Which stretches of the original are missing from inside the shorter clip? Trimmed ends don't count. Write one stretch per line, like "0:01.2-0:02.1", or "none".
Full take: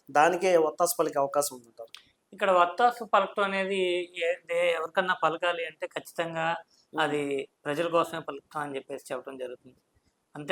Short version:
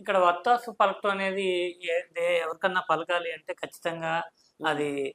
none